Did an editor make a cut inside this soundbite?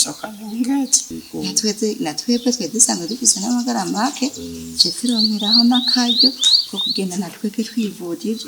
yes; 1 cut; at 1.0 s

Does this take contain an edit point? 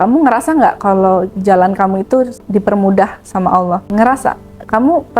yes; 2 cuts; at 2.4 s, 3.9 s

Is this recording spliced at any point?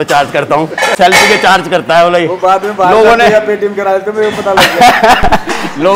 yes; 1 cut; at 0.9 s

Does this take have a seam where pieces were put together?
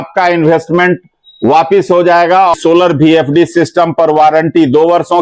yes; 1 cut; at 2.6 s

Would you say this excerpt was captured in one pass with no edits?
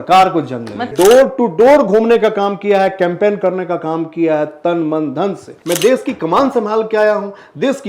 no; 2 cuts; at 0.9 s, 5.5 s

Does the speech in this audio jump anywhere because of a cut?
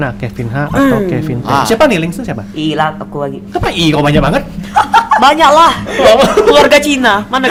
no; 0 cuts

